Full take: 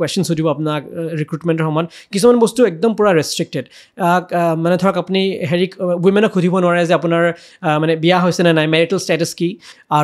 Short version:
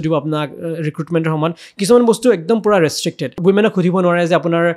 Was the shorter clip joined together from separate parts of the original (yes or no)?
yes